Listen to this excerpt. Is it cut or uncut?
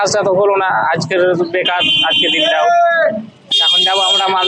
uncut